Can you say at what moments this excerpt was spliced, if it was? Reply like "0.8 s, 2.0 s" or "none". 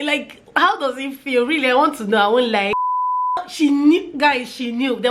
3.1 s